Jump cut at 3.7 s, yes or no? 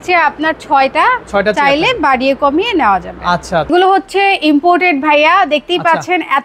yes